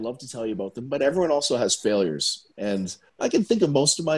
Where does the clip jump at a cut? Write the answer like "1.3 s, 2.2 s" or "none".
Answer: 3.2 s